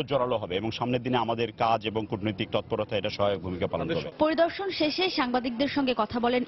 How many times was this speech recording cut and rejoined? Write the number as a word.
zero